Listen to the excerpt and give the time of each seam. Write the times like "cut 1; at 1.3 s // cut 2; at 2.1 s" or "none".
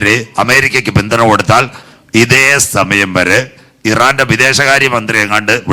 cut 1; at 1.9 s

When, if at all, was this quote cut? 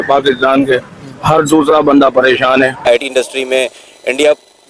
cut 1; at 2.8 s

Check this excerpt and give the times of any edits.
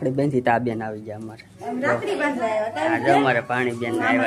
none

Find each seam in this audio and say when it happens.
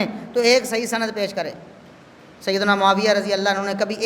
none

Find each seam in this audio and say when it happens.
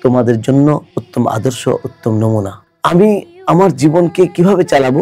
cut 1; at 1.0 s

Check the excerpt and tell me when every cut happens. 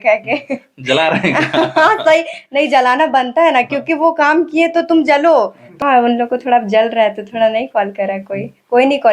cut 1; at 5.6 s

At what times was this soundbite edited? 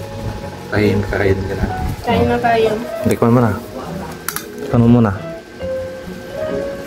none

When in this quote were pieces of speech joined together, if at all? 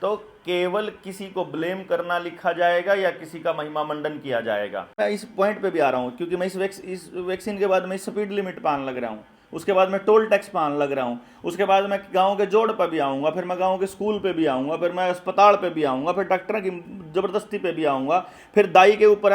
cut 1; at 4.9 s

